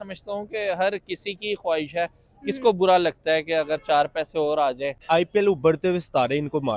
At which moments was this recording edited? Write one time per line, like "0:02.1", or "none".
0:04.9